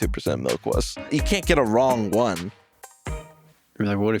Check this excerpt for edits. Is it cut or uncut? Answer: cut